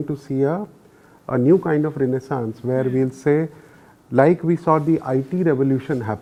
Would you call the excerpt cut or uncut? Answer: uncut